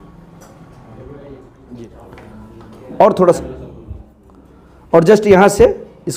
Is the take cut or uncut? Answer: cut